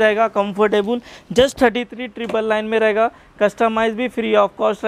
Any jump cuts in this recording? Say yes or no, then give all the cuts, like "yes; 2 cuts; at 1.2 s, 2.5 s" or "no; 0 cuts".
no; 0 cuts